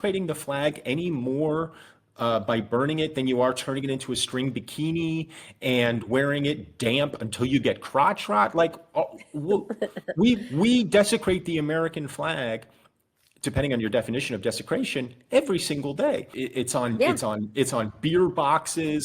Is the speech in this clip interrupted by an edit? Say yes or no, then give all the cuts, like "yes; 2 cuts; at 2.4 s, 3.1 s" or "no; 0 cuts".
yes; 1 cut; at 16.3 s